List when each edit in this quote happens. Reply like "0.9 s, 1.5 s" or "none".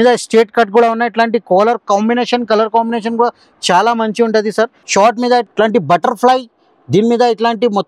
4.8 s, 5.5 s